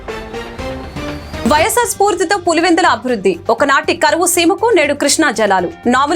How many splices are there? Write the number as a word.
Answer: one